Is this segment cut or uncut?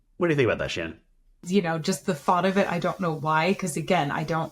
cut